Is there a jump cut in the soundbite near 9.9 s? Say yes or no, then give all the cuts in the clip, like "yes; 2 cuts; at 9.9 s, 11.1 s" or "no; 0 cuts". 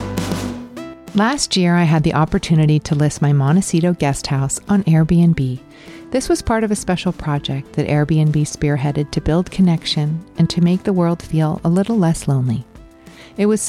no; 1 cut; at 1.0 s